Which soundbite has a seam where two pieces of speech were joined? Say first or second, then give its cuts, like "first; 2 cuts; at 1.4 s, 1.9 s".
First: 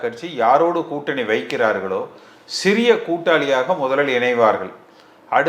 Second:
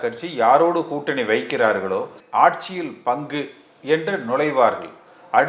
second; 1 cut; at 2.2 s